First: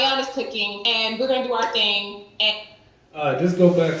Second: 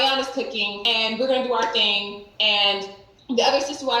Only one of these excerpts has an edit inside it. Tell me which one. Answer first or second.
second